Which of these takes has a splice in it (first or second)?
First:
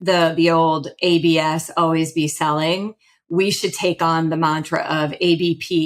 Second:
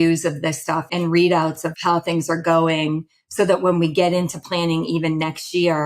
second